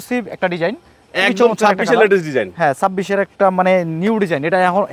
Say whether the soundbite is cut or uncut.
uncut